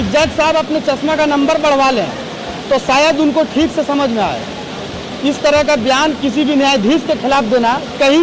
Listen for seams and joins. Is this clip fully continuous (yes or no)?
yes